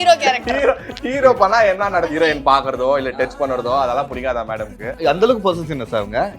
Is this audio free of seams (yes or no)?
no